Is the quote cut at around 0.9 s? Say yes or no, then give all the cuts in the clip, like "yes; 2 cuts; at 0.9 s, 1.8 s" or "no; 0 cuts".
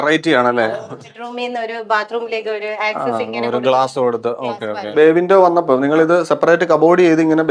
yes; 2 cuts; at 0.9 s, 4.9 s